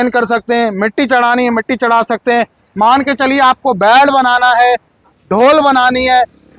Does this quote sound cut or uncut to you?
uncut